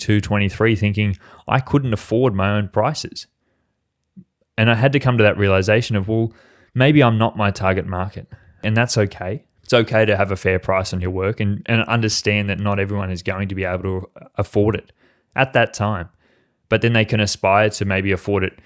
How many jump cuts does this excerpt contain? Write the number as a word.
two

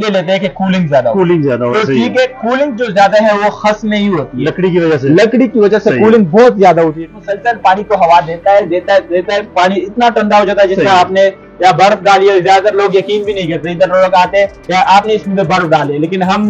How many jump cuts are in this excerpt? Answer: one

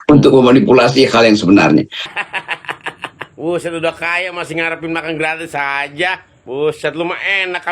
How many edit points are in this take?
one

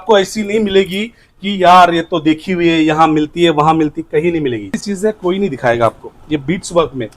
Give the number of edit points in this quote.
one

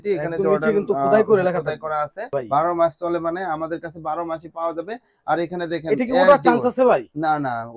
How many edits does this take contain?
one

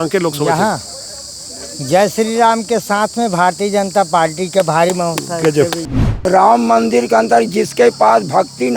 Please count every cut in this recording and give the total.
one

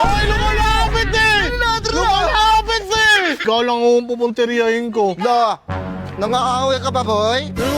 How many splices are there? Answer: one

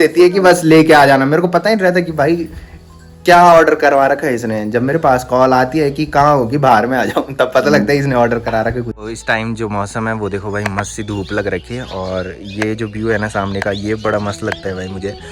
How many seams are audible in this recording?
zero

